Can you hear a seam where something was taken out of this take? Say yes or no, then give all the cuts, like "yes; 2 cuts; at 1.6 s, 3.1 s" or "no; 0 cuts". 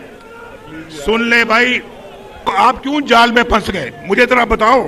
yes; 1 cut; at 2.5 s